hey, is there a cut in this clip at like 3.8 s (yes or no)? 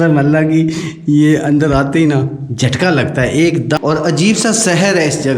yes